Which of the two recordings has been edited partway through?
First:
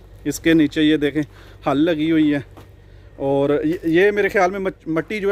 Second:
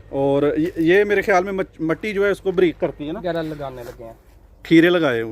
second; 1 cut; at 3.2 s

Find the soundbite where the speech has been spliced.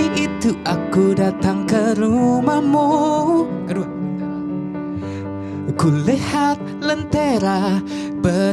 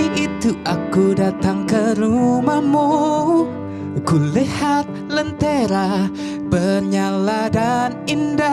second; 1 cut; at 3.6 s

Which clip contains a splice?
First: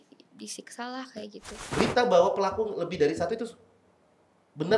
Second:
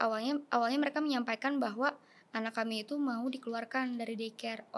first; 1 cut; at 1.7 s

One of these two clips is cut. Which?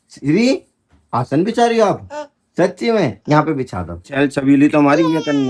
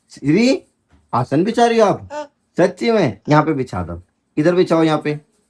first; 1 cut; at 4.0 s

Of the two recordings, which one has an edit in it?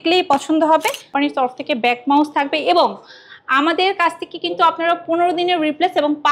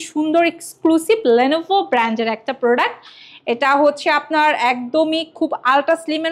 first; 1 cut; at 1.1 s

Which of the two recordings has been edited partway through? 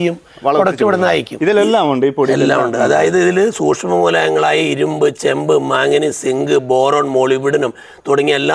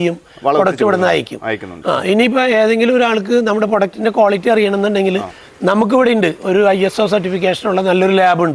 first; 1 cut; at 1.3 s

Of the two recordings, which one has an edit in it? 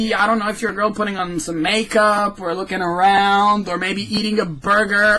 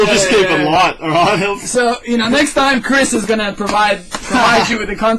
first; 1 cut; at 1.5 s

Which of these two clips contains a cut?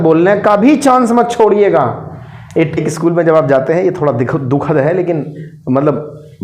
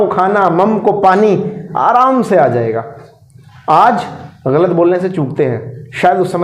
first; 1 cut; at 2.8 s

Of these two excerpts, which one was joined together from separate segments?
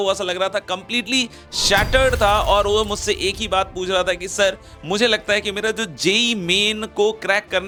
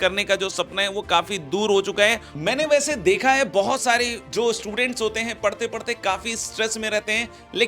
second; 1 cut; at 2.3 s

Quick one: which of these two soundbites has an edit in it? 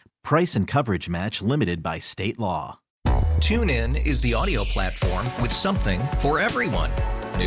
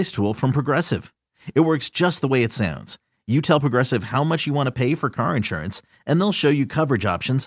first; 1 cut; at 2.8 s

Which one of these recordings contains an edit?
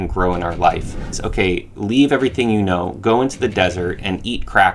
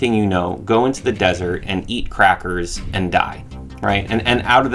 first; 1 cut; at 1.2 s

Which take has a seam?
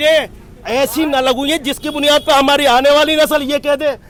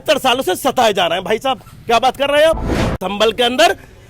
second; 1 cut; at 3.0 s

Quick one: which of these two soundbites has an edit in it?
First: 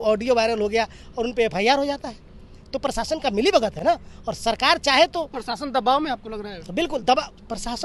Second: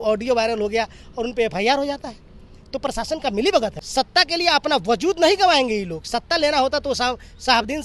second; 1 cut; at 3.8 s

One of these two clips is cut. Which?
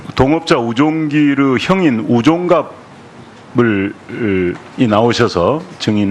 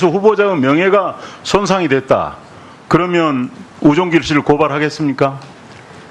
second; 1 cut; at 3.7 s

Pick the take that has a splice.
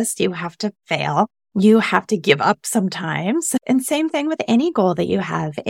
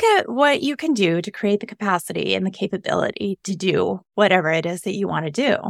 first; 2 cuts; at 1.4 s, 3.6 s

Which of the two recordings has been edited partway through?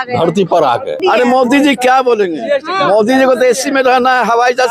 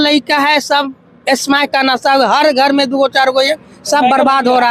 first; 1 cut; at 1.0 s

